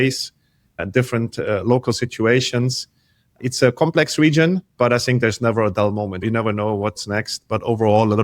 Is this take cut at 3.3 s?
no; 1 cut; at 6.2 s

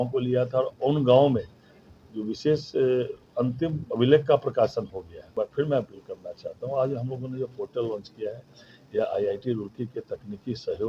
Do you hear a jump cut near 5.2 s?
yes; 1 cut; at 5.2 s

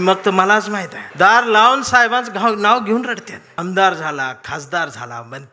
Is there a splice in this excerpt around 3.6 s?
yes; 2 cuts; at 1.0 s, 3.6 s

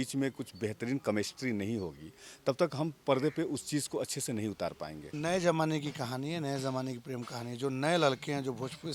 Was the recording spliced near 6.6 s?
no; 1 cut; at 5.1 s

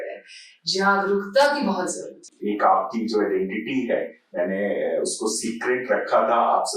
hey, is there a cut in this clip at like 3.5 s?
no; 1 cut; at 2.3 s

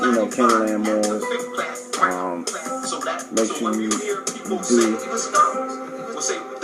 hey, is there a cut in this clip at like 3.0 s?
no; 0 cuts

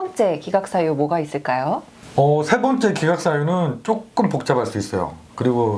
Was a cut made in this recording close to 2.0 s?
yes; 1 cut; at 2.0 s

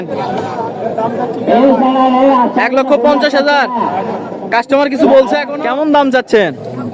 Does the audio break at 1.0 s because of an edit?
no; 1 cut; at 5.5 s

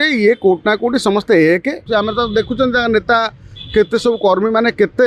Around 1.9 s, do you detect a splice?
yes; 1 cut; at 1.9 s

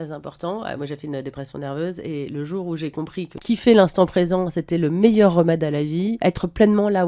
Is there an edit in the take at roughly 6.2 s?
yes; 2 cuts; at 3.3 s, 6.2 s

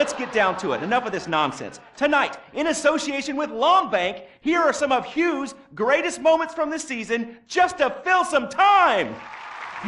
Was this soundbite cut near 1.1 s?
no; 0 cuts

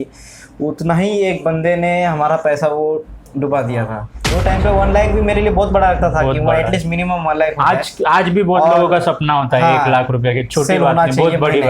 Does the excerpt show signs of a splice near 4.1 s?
yes; 1 cut; at 4.1 s

